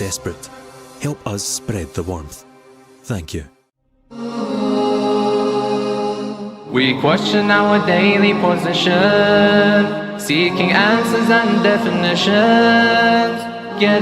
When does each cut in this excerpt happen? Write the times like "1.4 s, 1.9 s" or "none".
4.3 s